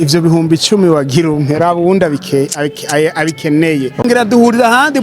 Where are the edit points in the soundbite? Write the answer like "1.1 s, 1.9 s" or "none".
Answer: 4.0 s